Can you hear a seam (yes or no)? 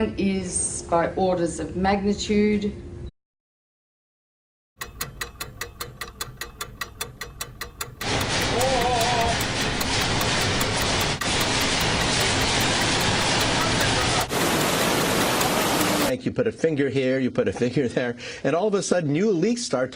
no